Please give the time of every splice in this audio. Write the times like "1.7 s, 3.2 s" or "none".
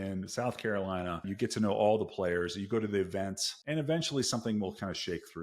1.3 s, 3.5 s